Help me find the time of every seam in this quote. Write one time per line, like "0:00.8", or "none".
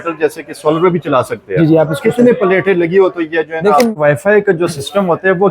0:03.9